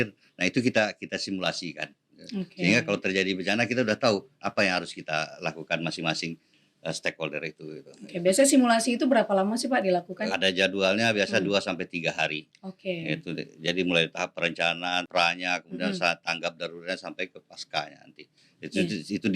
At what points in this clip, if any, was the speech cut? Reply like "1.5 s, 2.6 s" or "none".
10.2 s, 15.1 s